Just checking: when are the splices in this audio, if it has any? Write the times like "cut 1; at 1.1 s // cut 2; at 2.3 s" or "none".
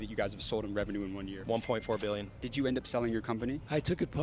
cut 1; at 1.3 s // cut 2; at 2.4 s